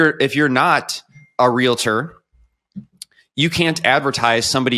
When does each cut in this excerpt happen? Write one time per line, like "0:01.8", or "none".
none